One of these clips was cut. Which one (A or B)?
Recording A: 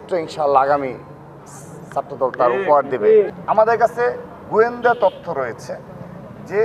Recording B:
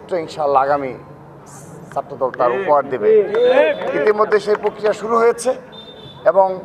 A